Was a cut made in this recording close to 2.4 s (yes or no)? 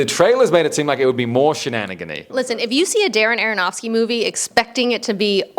yes